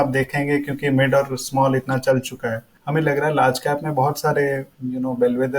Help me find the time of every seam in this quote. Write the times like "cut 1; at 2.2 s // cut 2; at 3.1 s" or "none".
cut 1; at 2.7 s // cut 2; at 4.7 s